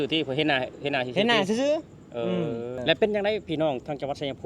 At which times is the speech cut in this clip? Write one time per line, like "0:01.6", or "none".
0:02.7

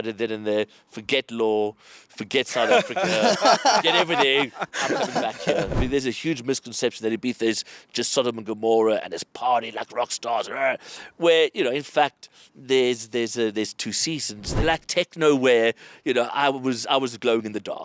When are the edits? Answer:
0:05.7
0:14.6

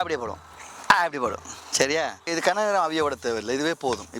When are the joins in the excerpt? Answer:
0:02.3

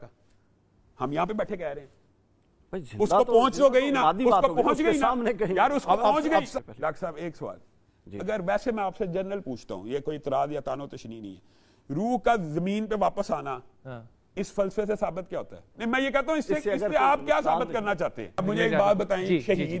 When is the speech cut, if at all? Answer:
0:06.5
0:15.6
0:18.4

